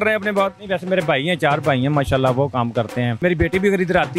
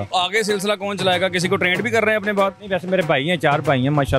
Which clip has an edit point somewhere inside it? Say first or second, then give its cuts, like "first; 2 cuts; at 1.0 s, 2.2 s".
first; 1 cut; at 3.2 s